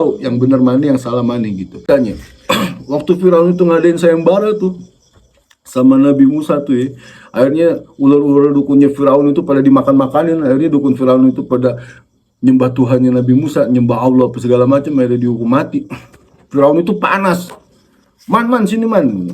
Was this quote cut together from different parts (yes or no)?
yes